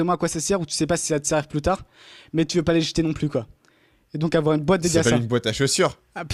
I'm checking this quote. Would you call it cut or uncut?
uncut